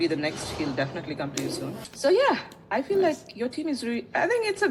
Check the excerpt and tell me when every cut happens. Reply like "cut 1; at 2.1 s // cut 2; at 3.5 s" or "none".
cut 1; at 1.8 s